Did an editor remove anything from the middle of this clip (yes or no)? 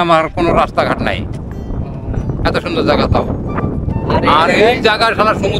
no